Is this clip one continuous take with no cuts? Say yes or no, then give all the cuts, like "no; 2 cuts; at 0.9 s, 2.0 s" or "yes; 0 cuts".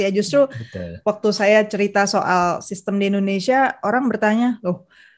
yes; 0 cuts